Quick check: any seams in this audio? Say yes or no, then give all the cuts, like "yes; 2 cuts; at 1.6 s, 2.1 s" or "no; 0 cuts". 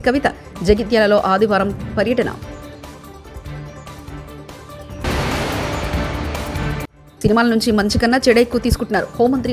no; 0 cuts